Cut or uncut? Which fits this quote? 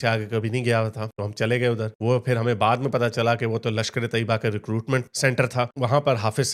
uncut